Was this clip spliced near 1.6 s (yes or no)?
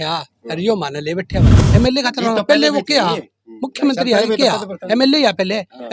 yes